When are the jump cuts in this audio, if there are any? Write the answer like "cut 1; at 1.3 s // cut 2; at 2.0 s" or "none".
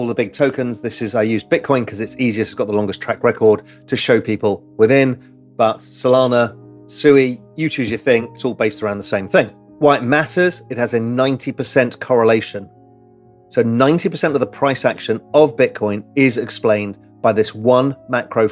cut 1; at 9.6 s